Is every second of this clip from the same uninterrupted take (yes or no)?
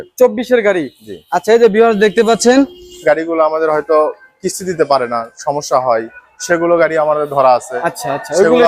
no